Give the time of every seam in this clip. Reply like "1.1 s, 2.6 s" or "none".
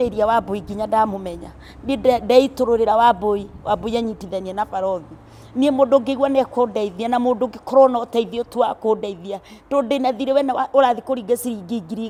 none